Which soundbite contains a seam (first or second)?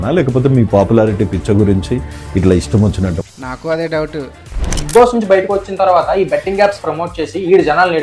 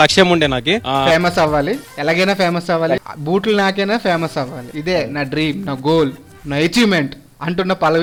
first